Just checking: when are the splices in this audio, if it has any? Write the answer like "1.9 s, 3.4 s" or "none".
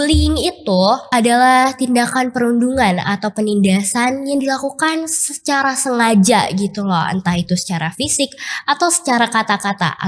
1.0 s